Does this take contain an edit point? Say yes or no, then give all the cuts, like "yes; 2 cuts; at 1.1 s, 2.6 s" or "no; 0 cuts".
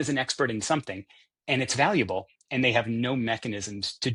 no; 0 cuts